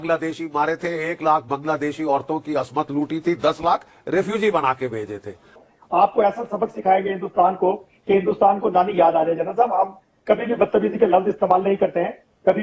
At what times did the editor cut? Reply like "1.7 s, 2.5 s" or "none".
5.5 s